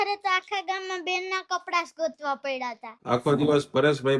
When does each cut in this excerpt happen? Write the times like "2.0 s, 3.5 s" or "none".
3.0 s